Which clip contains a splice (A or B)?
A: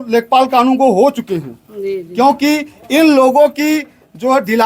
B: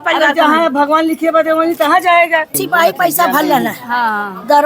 B